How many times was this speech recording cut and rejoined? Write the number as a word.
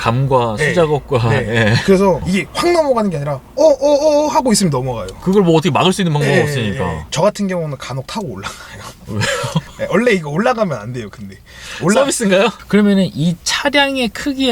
three